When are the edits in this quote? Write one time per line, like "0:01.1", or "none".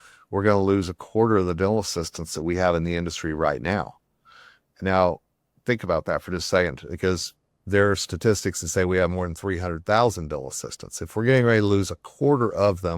none